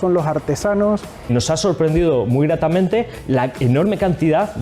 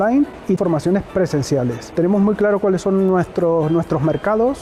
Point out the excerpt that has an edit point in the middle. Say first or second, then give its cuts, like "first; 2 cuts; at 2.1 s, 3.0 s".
first; 1 cut; at 1.3 s